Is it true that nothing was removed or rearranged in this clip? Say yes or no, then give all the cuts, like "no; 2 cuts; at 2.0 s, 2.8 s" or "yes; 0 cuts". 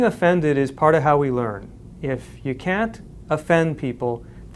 yes; 0 cuts